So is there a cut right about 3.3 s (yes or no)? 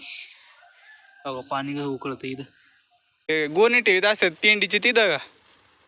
yes